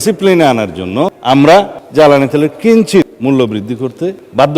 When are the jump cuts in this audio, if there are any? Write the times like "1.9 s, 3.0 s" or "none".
1.2 s, 3.1 s